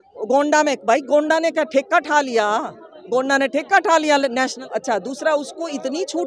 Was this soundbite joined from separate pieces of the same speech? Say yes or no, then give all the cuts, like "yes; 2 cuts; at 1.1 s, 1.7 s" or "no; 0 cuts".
yes; 1 cut; at 4.6 s